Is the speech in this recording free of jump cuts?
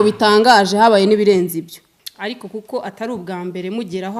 no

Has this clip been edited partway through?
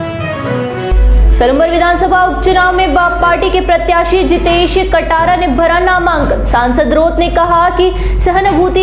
yes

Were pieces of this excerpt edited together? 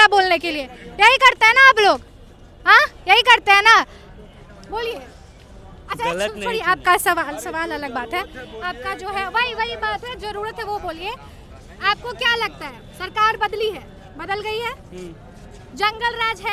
no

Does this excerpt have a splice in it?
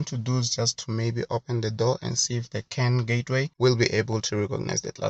no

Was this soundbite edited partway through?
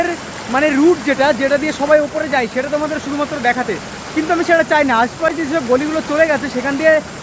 no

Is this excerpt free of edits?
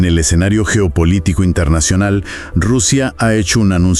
yes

